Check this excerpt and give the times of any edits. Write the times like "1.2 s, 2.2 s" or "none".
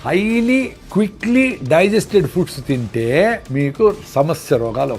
3.4 s

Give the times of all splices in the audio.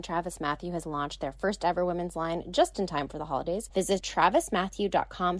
4.0 s

